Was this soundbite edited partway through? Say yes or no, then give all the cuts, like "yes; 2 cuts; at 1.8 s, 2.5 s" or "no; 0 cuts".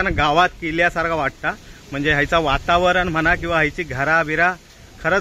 no; 0 cuts